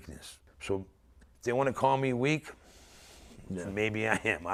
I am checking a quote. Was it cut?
no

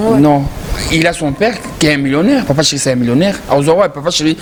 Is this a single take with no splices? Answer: yes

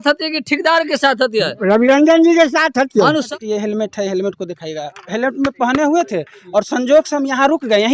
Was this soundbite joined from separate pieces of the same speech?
yes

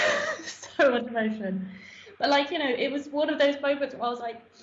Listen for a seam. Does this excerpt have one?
no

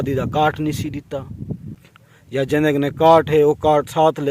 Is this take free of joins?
no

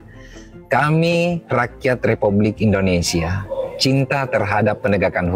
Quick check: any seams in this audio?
no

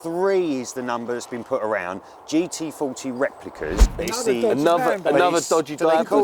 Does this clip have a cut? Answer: yes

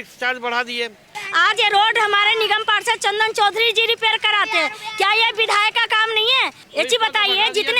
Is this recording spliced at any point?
yes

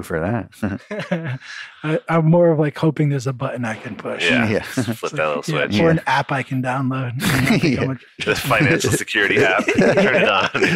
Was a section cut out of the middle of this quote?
no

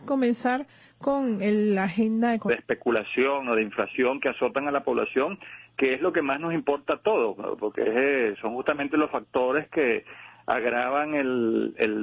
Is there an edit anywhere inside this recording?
no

